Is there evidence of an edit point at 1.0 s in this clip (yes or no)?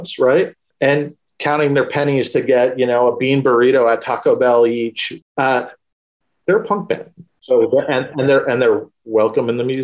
yes